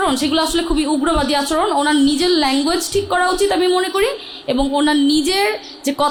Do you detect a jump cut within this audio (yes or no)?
no